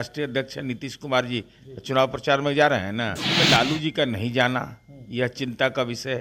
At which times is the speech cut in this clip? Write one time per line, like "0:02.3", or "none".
0:03.3